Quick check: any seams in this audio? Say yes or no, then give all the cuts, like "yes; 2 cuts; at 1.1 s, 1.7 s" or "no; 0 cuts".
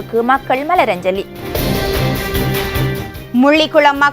yes; 2 cuts; at 1.6 s, 3.1 s